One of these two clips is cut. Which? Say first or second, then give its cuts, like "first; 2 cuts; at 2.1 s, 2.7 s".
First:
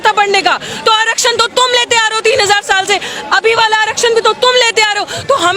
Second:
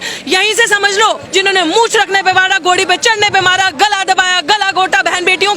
second; 1 cut; at 1.2 s